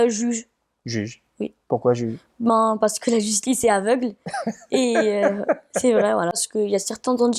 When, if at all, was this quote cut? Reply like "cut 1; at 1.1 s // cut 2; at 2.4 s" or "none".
cut 1; at 6.4 s